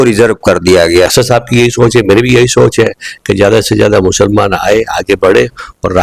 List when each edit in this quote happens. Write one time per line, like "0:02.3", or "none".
0:01.1